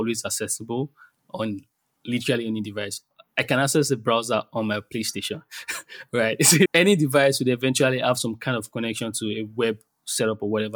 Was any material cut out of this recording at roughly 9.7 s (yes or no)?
no